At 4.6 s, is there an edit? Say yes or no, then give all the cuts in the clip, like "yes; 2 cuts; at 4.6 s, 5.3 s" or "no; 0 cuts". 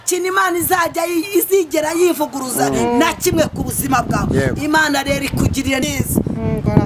no; 1 cut; at 5.8 s